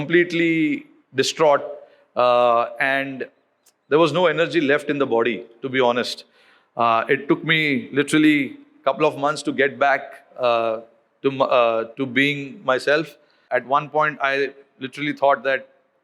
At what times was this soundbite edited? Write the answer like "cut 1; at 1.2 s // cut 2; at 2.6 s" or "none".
cut 1; at 13.4 s